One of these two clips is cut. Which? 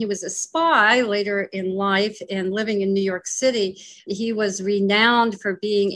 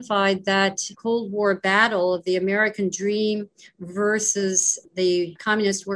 second; 1 cut; at 0.9 s

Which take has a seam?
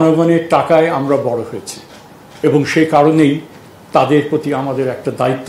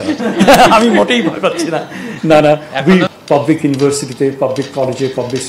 second; 1 cut; at 3.2 s

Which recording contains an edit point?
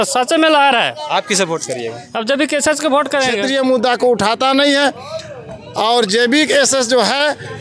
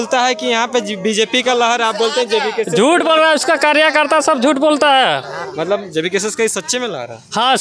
first; 1 cut; at 3.4 s

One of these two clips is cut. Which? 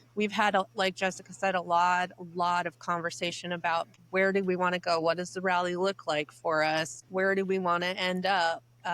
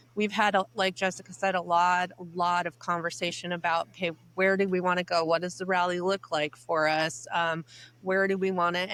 first; 2 cuts; at 3.9 s, 7.0 s

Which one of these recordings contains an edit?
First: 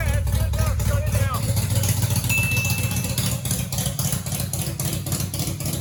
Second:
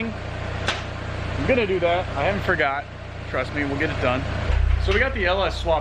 second; 1 cut; at 4.4 s

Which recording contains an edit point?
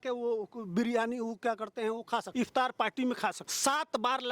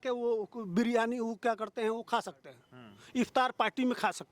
first; 2 cuts; at 2.3 s, 3.5 s

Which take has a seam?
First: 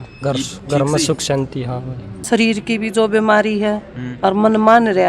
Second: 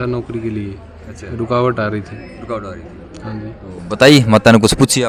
first; 1 cut; at 2.3 s

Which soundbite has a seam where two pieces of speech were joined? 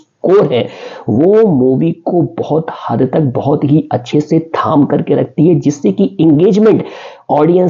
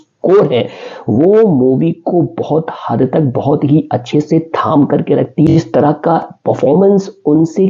second; 1 cut; at 5.5 s

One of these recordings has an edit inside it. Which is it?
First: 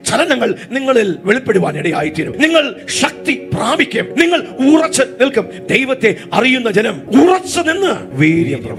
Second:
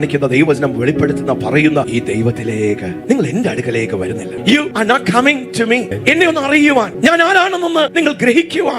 second; 4 cuts; at 1.9 s, 4.5 s, 6.9 s, 7.9 s

